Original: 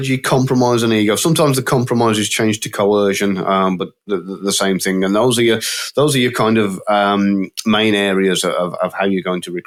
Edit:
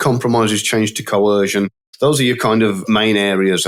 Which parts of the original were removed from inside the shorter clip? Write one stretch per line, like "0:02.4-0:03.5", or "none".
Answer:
0:03.4-0:05.7
0:06.7-0:07.6